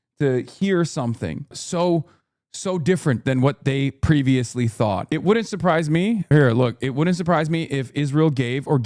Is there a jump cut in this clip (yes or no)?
yes